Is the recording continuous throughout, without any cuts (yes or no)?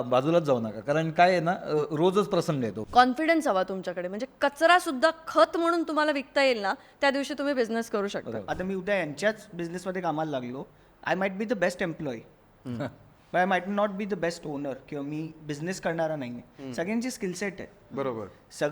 no